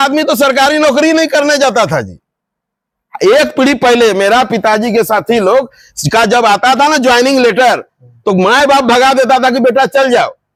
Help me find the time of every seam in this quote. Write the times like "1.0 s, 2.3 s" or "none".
none